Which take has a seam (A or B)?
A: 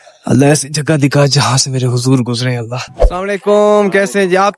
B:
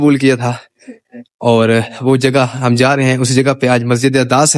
A